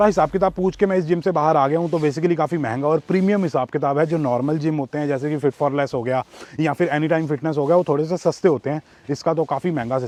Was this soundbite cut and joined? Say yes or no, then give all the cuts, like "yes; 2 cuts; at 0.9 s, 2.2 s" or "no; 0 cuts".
no; 0 cuts